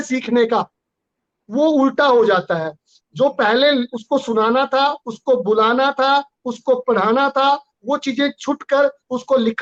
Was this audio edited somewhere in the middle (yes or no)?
no